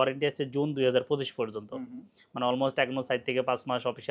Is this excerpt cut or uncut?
uncut